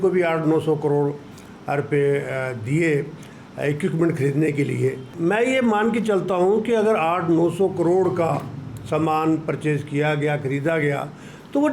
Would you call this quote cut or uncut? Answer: cut